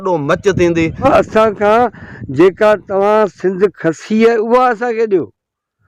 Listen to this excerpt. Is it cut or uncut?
cut